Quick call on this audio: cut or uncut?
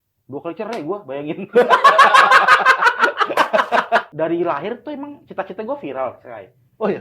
cut